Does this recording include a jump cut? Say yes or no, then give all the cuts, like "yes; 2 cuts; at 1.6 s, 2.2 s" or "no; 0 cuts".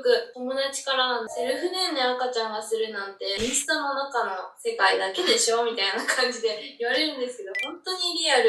no; 0 cuts